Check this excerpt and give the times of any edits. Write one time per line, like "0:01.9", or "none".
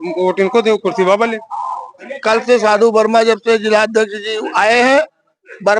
0:02.1